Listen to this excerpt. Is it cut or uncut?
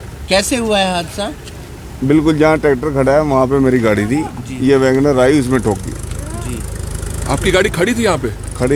uncut